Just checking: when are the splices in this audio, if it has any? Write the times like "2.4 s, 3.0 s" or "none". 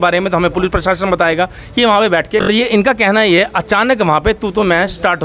2.5 s